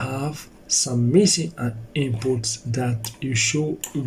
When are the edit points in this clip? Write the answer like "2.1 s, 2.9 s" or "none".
none